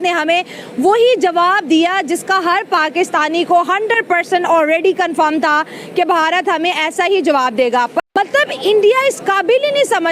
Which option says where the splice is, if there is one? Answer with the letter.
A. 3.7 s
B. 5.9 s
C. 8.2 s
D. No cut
C